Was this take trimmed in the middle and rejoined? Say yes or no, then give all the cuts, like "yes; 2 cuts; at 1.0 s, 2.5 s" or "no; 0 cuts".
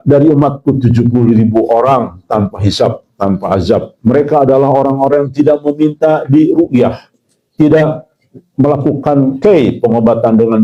no; 0 cuts